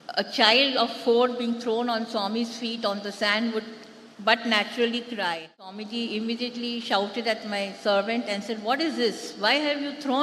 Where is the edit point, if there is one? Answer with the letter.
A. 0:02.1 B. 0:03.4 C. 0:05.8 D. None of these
C